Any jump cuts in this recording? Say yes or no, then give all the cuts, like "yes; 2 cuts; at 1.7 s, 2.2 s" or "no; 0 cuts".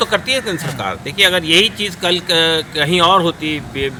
no; 0 cuts